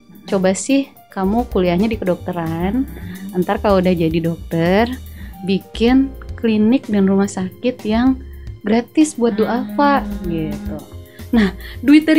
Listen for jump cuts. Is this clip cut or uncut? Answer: uncut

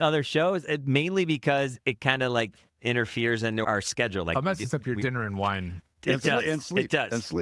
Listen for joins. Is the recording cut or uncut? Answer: uncut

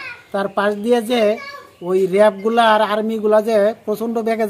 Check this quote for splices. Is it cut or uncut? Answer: uncut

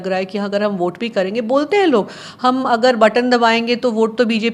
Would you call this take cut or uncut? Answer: uncut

